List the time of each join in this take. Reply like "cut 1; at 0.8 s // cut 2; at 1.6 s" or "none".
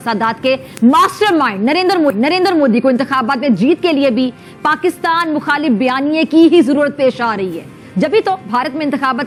none